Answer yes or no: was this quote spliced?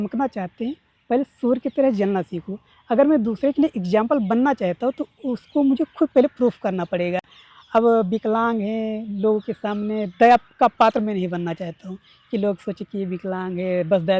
no